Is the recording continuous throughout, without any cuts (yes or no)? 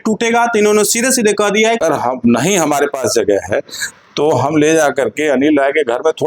no